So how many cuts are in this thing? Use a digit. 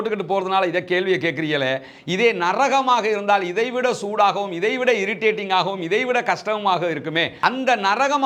0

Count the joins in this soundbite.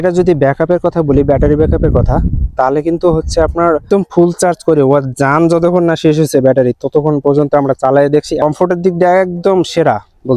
2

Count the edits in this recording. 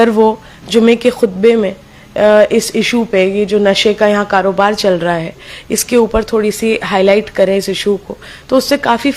0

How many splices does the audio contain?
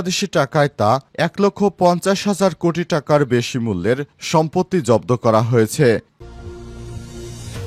1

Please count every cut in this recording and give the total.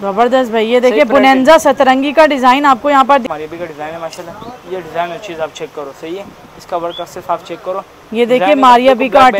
1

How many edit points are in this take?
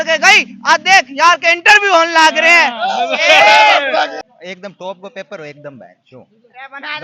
1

